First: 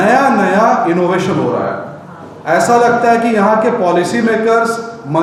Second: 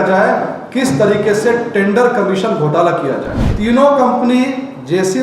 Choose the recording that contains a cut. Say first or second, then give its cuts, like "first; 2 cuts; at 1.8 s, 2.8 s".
second; 1 cut; at 3.5 s